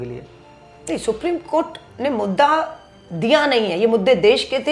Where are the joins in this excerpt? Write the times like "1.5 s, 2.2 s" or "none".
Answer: none